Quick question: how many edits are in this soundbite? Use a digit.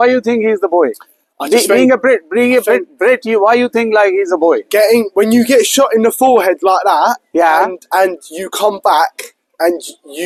0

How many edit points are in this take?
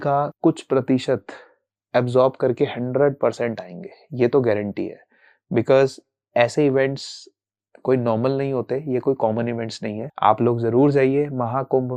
0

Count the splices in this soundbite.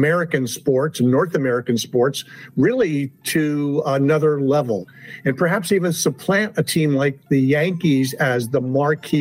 1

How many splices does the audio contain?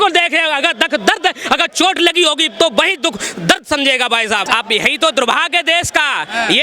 1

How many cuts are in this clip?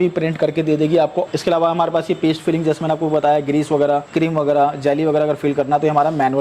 2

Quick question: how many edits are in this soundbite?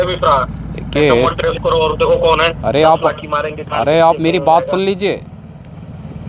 1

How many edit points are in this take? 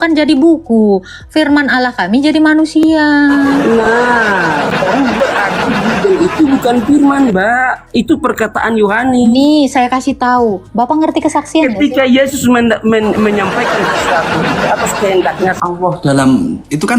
3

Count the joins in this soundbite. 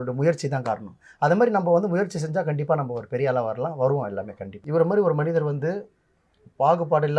1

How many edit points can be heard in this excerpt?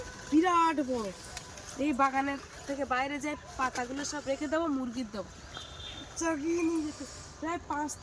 0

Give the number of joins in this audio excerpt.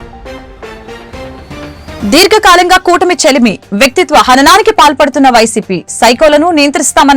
1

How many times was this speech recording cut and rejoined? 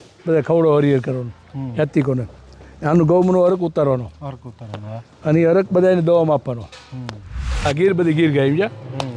1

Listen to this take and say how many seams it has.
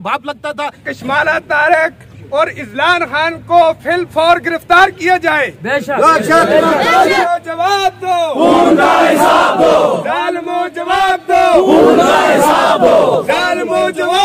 2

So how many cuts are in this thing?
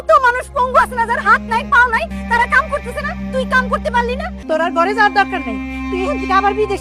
2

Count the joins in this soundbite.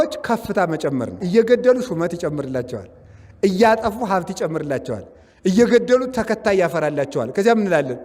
1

